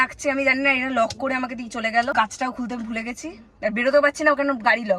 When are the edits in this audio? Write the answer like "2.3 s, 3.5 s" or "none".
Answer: 2.1 s

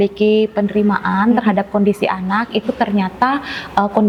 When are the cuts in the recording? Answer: none

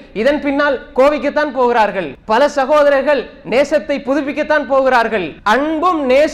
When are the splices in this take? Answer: 2.1 s, 5.3 s

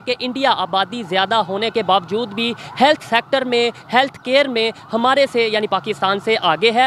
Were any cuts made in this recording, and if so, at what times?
none

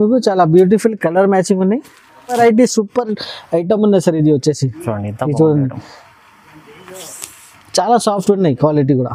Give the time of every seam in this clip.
2.3 s

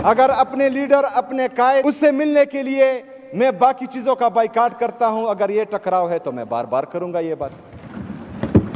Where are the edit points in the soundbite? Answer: 1.8 s

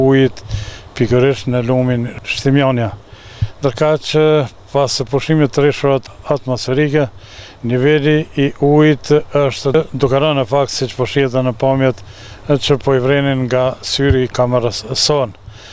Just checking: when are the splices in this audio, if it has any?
2.2 s, 6.0 s, 9.7 s

